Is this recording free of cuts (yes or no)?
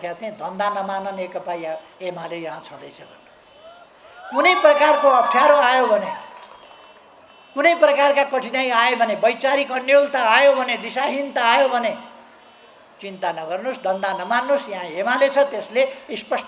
yes